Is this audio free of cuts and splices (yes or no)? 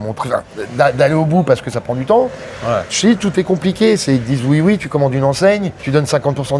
yes